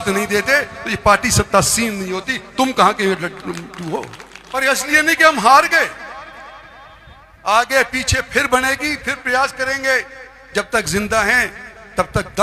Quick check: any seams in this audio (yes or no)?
yes